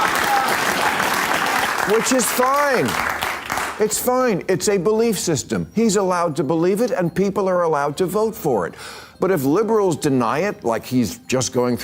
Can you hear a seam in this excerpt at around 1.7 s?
yes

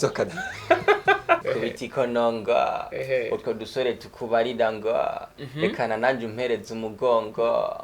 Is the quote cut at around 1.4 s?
yes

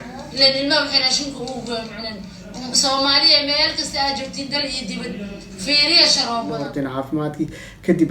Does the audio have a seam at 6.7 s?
yes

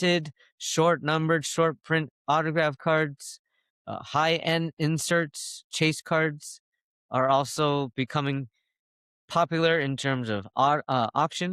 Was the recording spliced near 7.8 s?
no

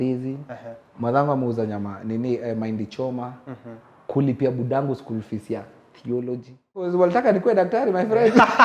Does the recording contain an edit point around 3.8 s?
no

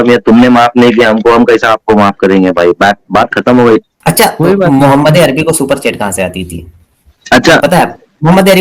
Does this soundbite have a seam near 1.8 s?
no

